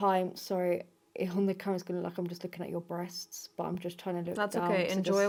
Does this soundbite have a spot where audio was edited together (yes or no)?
no